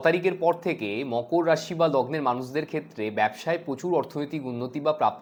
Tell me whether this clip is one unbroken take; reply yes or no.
yes